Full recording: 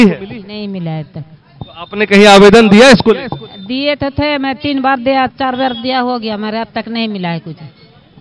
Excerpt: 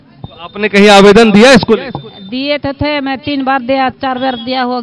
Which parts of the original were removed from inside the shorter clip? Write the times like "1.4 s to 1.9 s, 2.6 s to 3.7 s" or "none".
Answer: none